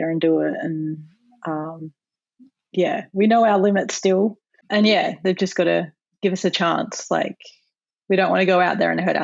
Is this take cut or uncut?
cut